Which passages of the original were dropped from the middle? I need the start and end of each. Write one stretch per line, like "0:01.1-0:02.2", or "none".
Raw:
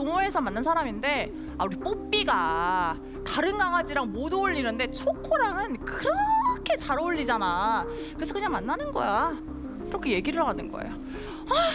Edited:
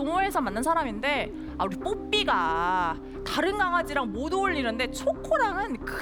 none